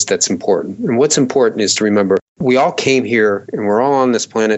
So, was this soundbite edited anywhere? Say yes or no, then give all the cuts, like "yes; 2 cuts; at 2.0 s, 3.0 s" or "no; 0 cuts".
no; 0 cuts